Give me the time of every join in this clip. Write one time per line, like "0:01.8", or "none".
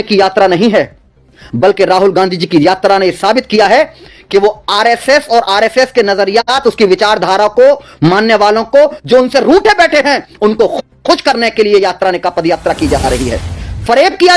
none